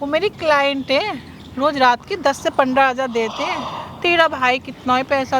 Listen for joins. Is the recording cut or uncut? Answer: uncut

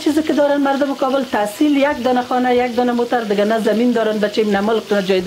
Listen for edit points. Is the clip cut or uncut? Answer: uncut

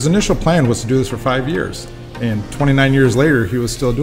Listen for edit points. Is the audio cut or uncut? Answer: uncut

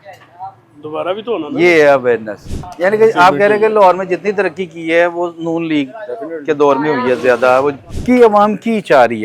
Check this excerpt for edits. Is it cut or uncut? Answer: cut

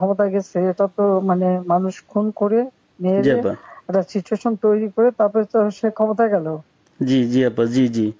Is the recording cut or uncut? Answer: uncut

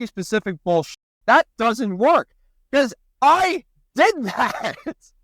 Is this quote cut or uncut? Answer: cut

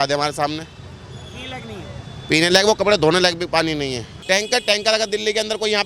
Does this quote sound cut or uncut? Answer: cut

